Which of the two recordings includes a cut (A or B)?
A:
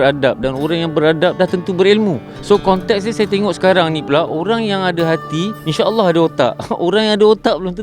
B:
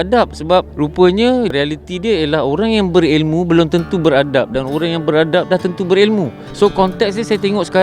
B